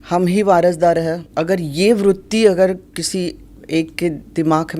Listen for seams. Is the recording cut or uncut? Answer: cut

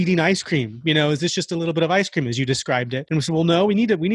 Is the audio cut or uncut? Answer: cut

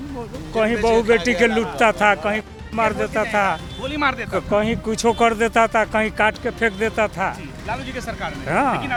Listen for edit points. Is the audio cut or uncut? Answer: uncut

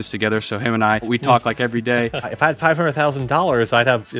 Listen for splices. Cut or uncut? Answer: cut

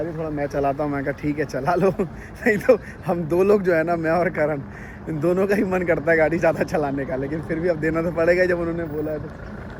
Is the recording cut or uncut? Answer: uncut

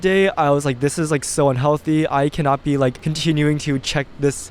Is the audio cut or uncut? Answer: cut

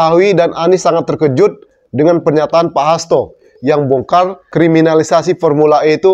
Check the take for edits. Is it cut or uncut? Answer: cut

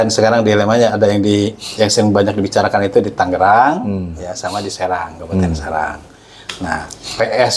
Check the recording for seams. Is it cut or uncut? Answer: uncut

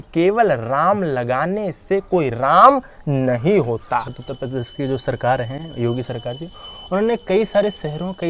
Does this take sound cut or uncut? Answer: cut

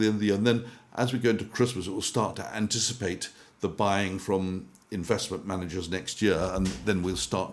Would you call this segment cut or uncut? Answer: uncut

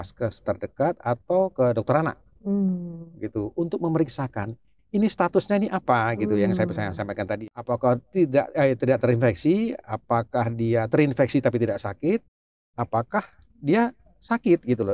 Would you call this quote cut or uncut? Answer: cut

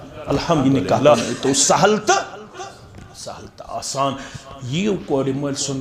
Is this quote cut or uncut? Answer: cut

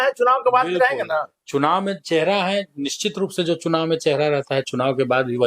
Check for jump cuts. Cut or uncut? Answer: uncut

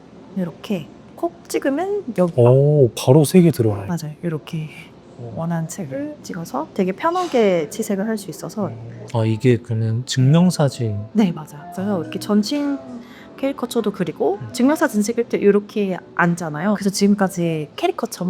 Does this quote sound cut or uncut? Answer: cut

